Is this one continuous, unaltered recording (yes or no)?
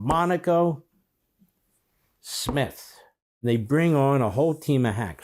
no